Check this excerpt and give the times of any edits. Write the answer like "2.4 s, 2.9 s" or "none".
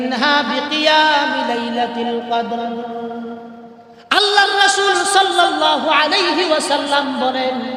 none